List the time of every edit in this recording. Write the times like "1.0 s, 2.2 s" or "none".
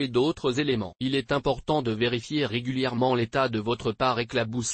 0.9 s